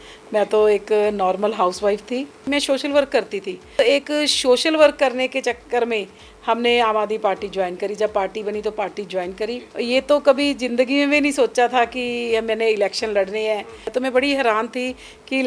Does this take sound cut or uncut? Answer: cut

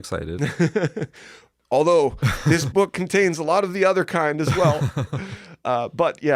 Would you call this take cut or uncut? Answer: uncut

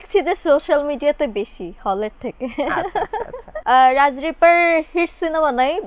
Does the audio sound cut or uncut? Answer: cut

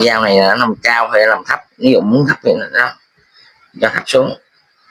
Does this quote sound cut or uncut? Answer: uncut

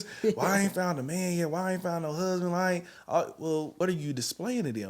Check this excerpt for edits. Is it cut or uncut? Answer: cut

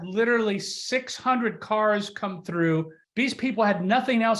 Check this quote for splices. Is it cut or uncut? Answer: uncut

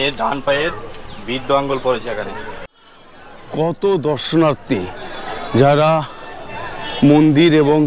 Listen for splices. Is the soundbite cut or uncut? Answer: cut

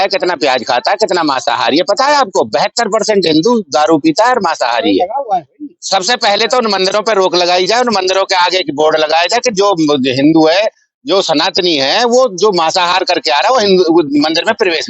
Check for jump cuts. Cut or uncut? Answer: uncut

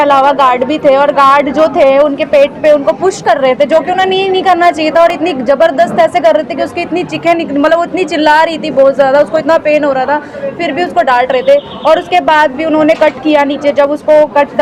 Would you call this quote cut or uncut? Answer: uncut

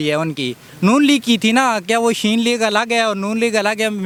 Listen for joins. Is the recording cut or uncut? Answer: uncut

